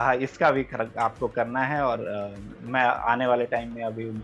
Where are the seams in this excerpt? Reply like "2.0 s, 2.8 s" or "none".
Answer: none